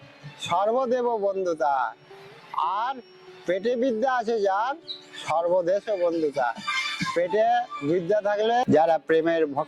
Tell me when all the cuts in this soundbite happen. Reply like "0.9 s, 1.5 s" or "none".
8.6 s